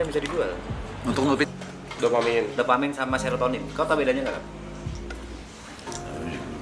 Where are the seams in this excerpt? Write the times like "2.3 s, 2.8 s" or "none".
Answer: 1.5 s